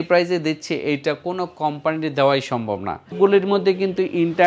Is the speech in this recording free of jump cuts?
no; 1 cut; at 3.1 s

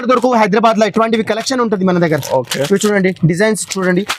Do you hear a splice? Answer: no; 0 cuts

